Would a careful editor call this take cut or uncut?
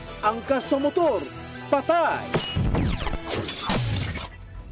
cut